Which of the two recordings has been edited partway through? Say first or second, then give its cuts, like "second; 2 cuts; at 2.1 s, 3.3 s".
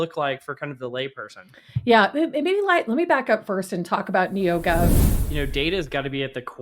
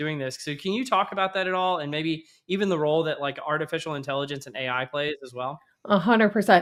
first; 1 cut; at 5.0 s